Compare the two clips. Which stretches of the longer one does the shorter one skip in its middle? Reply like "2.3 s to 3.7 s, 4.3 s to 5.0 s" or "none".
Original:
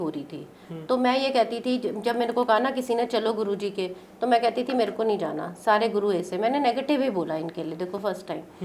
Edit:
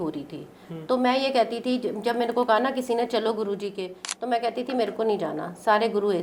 none

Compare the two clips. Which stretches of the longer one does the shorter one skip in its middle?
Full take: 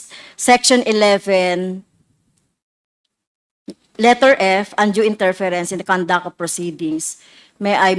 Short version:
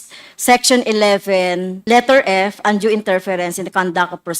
1.7 s to 3.9 s

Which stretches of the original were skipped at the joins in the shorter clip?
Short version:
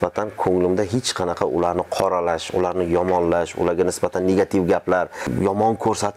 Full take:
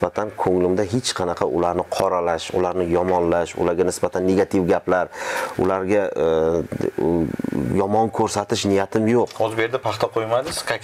5.2 s to 7.6 s

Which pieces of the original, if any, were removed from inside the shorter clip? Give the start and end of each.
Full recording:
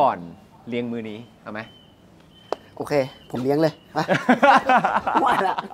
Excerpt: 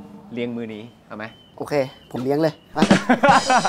1.8 s to 2.7 s

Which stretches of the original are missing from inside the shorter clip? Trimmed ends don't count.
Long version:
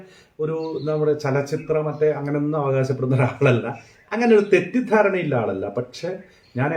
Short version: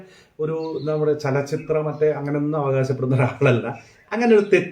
none

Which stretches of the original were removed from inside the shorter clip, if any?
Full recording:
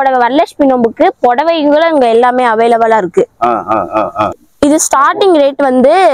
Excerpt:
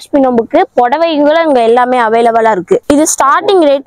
3.3 s to 4.6 s

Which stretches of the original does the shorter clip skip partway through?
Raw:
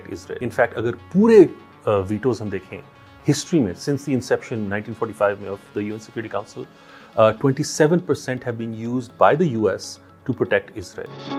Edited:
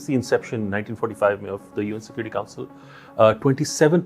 none

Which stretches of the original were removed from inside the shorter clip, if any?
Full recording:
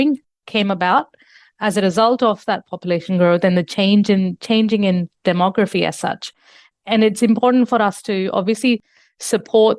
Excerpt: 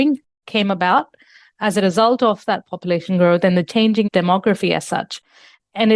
3.8 s to 4.9 s

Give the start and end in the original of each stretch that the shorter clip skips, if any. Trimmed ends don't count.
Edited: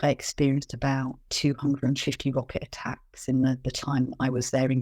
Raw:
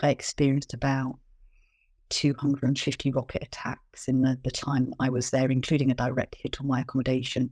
1.2 s to 2.0 s

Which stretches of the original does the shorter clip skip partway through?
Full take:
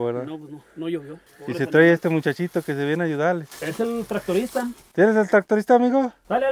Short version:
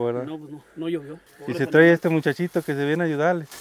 none

